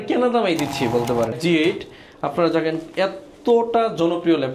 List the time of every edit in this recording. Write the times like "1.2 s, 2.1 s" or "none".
1.3 s